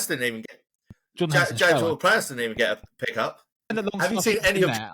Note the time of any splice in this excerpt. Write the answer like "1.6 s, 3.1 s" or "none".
3.7 s